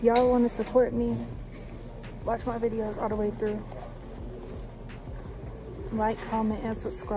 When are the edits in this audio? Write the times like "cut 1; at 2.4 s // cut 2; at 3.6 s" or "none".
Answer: none